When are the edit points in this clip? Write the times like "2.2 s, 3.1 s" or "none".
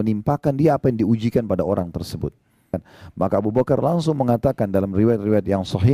2.8 s